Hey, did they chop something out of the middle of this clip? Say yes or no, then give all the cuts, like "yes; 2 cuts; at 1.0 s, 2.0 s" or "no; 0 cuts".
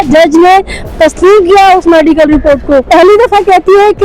yes; 1 cut; at 2.9 s